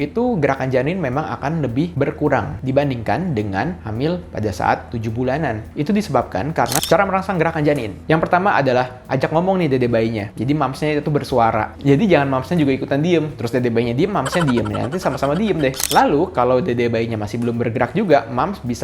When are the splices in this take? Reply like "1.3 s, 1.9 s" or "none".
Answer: 6.8 s, 15.8 s